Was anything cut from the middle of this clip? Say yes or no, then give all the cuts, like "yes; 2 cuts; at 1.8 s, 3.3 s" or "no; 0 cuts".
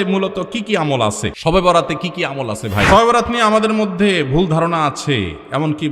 yes; 2 cuts; at 1.3 s, 2.9 s